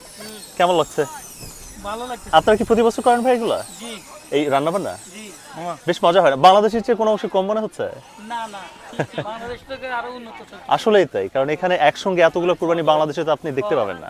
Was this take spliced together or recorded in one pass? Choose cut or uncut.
uncut